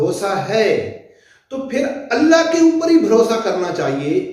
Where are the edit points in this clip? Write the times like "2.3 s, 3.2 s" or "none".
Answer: none